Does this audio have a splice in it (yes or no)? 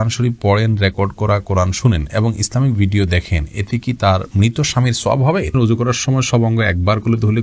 yes